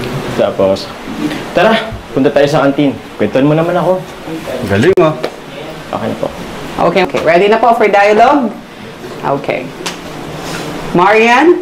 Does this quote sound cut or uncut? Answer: cut